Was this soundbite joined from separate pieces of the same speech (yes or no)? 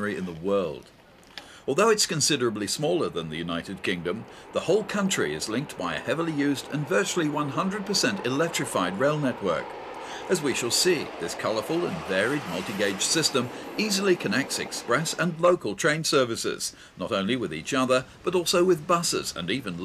no